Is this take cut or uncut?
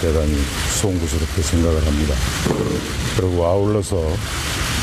uncut